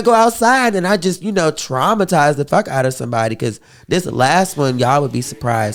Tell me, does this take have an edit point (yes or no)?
no